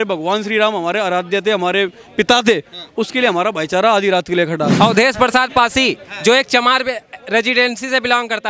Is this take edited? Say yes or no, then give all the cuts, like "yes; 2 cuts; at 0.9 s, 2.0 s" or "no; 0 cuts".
yes; 1 cut; at 4.7 s